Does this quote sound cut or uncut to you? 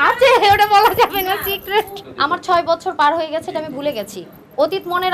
cut